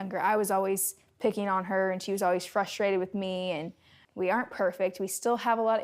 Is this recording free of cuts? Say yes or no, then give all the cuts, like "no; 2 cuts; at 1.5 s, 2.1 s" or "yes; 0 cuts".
no; 1 cut; at 3.9 s